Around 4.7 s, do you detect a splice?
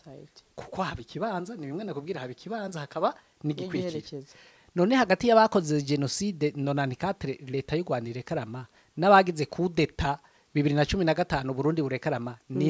no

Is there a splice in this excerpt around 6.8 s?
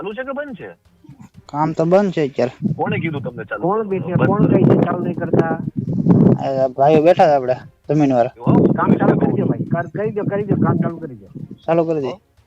no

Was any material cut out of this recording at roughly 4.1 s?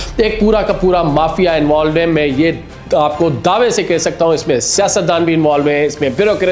no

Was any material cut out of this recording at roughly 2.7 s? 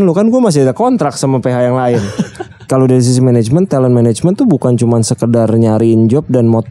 yes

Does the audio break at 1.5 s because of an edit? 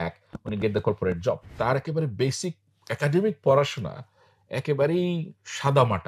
yes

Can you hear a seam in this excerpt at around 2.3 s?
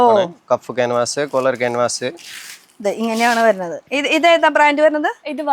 no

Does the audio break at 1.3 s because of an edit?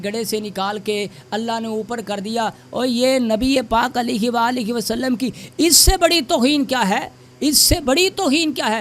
no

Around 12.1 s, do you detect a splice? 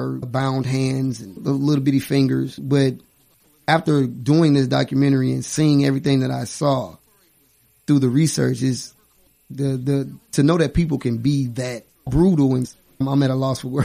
yes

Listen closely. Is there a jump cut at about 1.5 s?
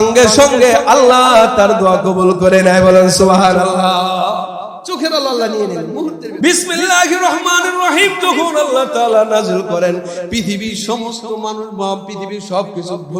no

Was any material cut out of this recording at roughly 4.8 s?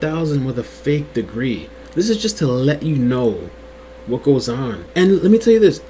yes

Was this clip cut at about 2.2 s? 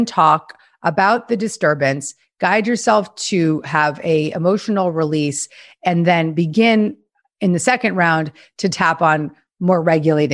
no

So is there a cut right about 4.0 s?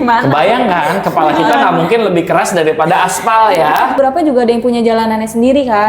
yes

